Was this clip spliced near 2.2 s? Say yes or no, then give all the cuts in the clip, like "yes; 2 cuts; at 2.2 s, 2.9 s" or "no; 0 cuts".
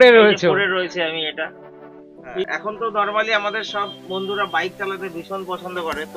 yes; 1 cut; at 2.2 s